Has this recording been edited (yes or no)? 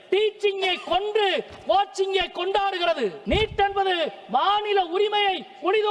yes